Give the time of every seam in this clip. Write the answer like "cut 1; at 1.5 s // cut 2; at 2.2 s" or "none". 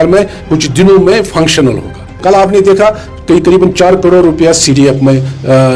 cut 1; at 2.2 s